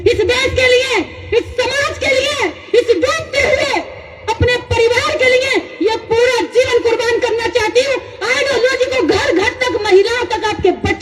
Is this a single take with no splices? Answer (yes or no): yes